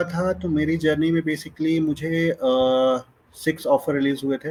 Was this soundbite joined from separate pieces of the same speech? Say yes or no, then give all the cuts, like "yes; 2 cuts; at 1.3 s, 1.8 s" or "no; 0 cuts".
no; 0 cuts